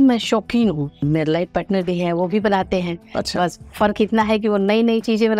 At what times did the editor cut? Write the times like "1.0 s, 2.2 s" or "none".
1.0 s